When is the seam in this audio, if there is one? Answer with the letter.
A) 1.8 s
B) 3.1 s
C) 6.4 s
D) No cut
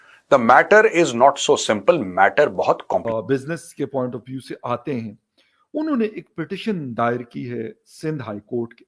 B